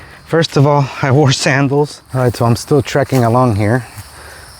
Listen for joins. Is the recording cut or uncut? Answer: cut